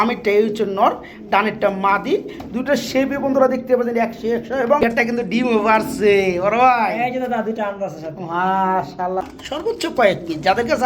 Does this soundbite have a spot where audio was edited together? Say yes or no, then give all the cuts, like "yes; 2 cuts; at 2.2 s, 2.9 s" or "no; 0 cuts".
yes; 2 cuts; at 4.9 s, 9.3 s